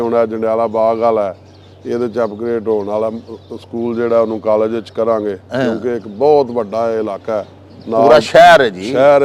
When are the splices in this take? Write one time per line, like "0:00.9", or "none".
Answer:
none